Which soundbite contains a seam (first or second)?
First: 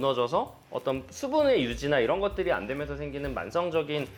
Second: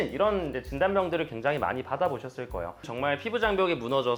second